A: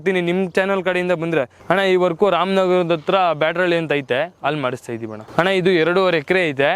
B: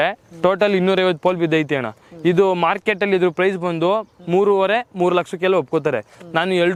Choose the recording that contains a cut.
A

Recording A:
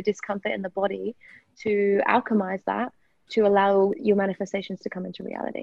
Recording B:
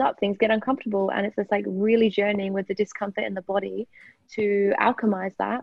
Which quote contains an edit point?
A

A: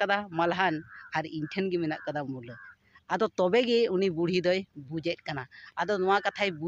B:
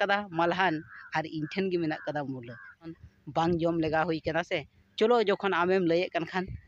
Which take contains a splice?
B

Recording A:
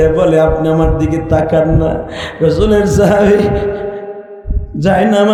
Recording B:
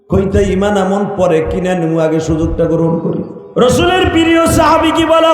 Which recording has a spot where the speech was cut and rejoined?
B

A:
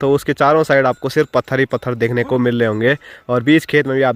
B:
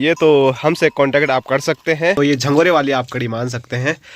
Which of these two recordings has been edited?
B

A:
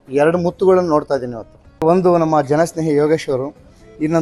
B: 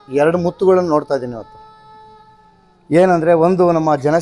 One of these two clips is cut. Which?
A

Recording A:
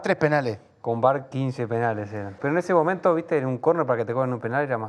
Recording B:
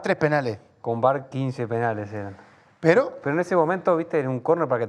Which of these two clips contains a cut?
A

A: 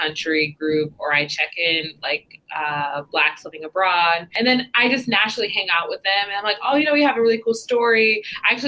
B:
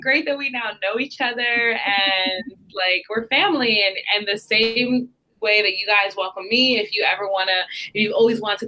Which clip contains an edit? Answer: A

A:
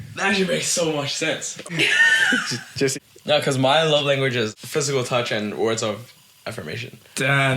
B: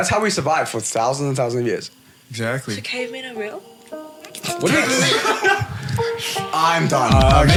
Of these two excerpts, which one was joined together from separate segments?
A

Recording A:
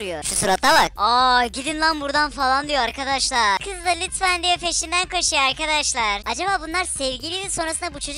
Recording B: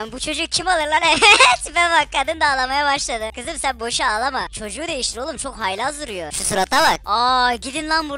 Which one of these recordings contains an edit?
A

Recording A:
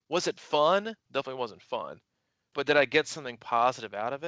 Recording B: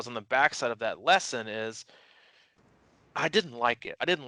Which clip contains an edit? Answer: A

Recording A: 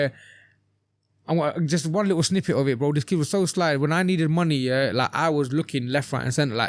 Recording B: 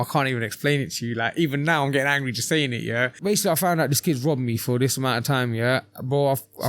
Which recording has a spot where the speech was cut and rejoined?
B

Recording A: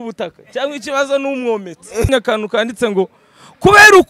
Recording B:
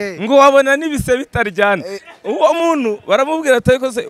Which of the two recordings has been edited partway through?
A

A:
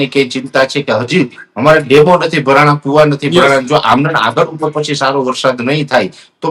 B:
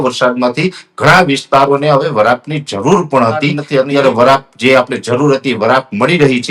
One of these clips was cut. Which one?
B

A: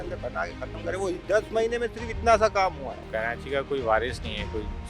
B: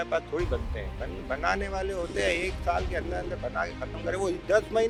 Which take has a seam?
A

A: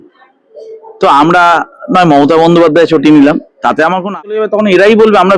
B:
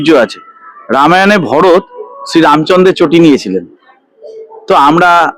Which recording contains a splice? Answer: A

